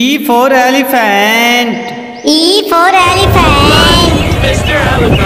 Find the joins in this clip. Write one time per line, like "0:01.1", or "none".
none